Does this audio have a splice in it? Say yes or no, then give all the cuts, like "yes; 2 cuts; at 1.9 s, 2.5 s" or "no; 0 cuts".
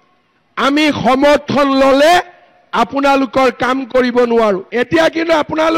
yes; 1 cut; at 4.7 s